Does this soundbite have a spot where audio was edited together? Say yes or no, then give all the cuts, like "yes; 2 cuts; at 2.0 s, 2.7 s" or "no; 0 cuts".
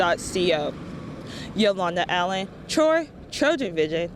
no; 0 cuts